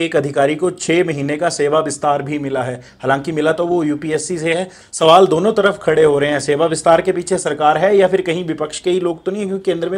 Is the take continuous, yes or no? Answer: yes